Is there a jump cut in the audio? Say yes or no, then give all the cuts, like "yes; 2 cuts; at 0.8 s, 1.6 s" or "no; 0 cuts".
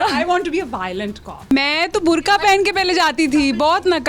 yes; 1 cut; at 1.5 s